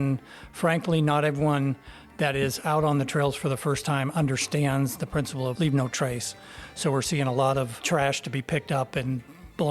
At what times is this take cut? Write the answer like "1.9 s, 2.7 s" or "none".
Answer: 5.5 s, 7.8 s

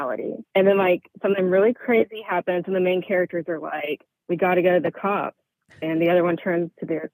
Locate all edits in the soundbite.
none

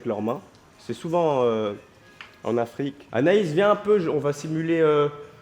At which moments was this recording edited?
3.0 s

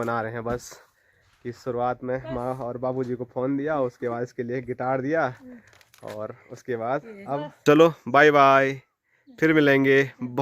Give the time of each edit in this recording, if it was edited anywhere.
7.6 s

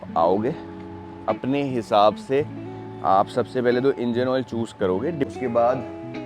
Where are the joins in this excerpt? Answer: 5.3 s

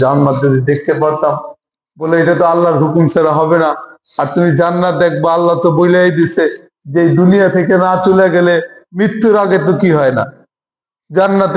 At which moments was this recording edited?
none

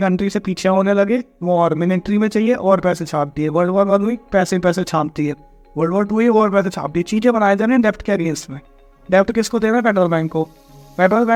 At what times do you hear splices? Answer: none

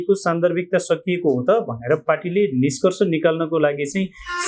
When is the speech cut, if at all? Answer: none

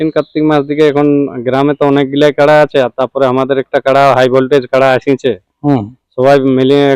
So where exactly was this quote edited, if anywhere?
none

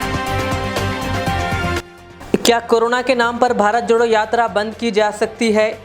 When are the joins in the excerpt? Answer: 1.7 s

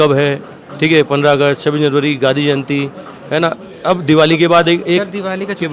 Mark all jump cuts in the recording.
none

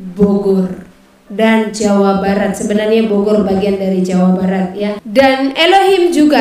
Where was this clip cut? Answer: 5.0 s

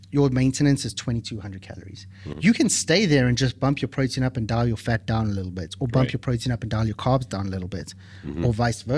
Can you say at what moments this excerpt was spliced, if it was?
none

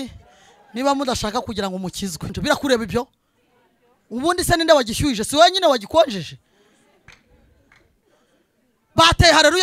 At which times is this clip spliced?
2.4 s

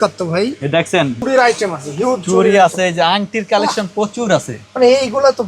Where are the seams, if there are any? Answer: 1.2 s

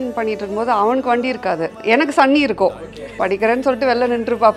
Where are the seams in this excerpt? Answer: 1.7 s, 3.2 s

